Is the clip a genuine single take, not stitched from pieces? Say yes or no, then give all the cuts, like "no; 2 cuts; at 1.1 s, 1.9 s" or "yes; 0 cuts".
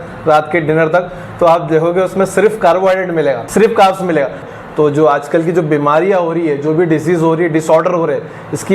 no; 1 cut; at 4.4 s